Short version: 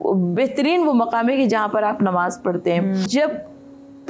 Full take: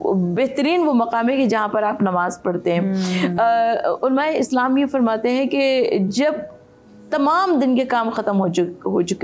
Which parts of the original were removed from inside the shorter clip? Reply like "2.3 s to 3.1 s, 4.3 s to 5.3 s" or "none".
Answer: 3.1 s to 6.1 s